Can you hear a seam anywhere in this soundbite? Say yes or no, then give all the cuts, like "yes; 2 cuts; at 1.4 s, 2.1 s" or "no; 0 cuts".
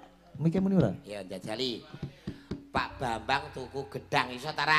no; 0 cuts